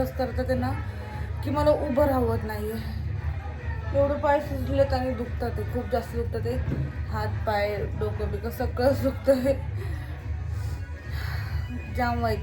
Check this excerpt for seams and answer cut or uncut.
uncut